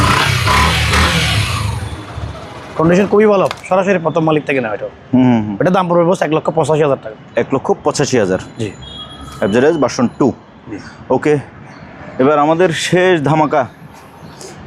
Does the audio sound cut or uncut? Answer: uncut